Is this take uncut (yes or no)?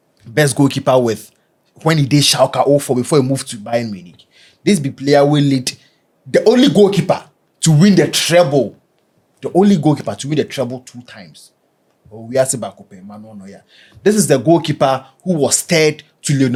yes